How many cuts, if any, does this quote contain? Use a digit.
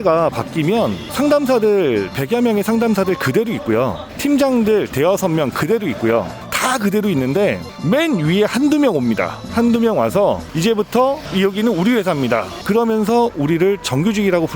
2